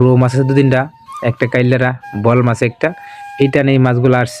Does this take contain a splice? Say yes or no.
no